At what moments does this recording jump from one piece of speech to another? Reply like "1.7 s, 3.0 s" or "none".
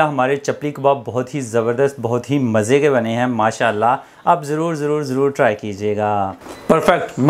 6.4 s